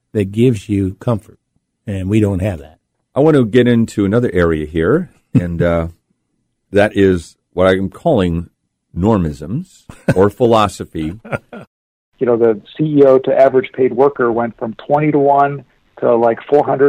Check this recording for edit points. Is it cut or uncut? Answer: cut